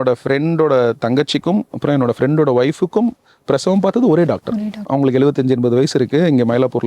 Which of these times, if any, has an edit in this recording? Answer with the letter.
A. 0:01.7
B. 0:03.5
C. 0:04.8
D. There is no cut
C